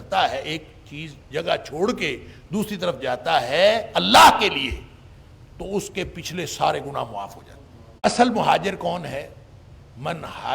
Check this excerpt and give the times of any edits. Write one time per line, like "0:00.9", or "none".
0:08.1